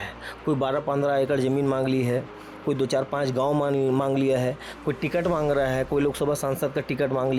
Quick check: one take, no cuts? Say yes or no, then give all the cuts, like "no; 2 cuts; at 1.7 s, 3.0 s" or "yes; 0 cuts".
yes; 0 cuts